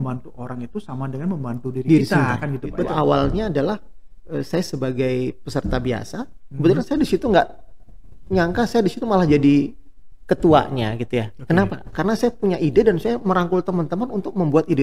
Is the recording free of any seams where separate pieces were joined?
no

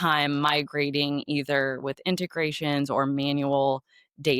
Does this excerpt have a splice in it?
no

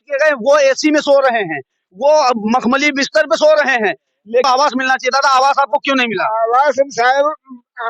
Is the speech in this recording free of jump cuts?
no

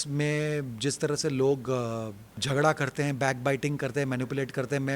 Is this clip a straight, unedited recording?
no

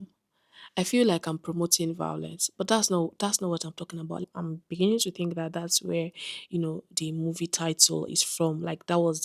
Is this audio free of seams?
no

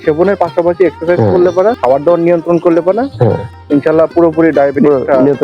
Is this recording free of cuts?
no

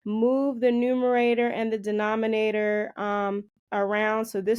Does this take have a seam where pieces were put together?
no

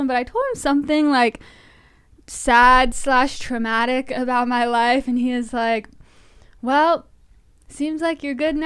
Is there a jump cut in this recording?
no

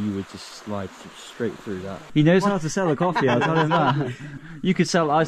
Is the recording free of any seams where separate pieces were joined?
no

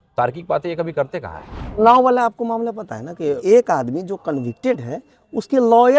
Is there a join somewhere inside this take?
yes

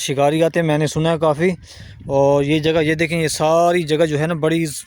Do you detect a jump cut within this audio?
no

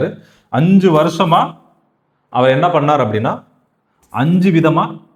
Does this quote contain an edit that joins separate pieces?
no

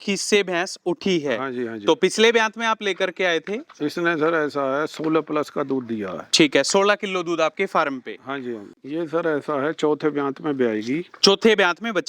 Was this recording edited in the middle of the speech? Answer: yes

